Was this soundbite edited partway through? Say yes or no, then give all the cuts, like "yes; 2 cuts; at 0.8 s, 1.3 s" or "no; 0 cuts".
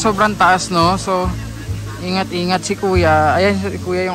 no; 0 cuts